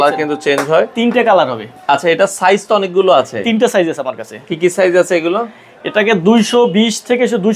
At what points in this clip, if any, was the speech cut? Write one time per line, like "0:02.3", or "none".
none